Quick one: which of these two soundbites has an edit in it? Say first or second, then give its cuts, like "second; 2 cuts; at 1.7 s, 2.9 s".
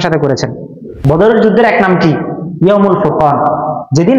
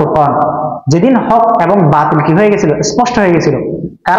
first; 1 cut; at 0.9 s